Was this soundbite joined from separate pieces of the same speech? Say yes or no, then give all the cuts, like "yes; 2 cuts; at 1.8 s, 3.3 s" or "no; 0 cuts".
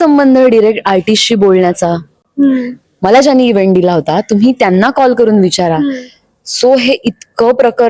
no; 0 cuts